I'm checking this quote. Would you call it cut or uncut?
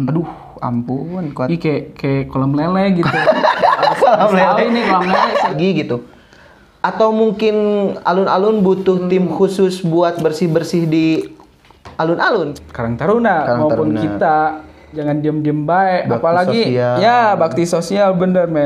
cut